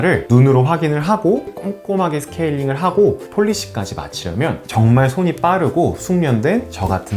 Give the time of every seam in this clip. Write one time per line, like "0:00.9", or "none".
0:01.5
0:03.2
0:04.6